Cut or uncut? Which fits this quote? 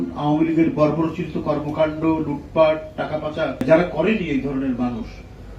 cut